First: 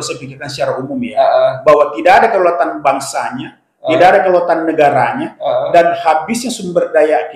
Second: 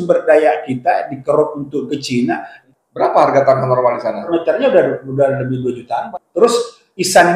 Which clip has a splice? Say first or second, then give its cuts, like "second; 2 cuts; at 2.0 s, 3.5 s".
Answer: second; 3 cuts; at 2.5 s, 4.3 s, 6.0 s